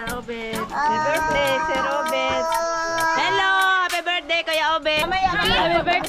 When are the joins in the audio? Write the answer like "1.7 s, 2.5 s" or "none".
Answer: 5.0 s